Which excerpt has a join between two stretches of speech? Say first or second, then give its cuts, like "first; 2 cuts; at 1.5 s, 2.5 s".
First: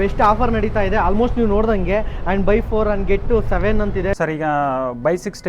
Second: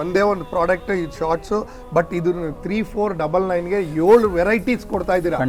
first; 1 cut; at 4.2 s